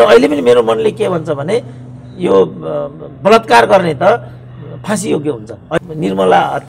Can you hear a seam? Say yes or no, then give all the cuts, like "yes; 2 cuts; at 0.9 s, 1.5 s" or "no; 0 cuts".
yes; 1 cut; at 5.8 s